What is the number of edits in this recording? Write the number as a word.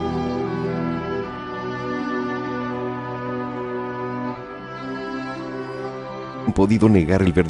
zero